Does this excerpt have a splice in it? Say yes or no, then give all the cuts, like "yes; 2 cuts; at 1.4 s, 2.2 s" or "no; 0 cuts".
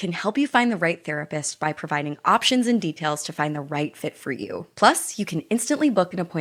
no; 0 cuts